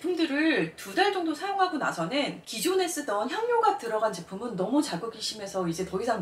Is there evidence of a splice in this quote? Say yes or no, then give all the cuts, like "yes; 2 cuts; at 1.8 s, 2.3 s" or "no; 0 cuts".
no; 0 cuts